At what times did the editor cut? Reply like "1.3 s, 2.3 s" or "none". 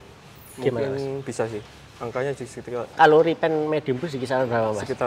2.9 s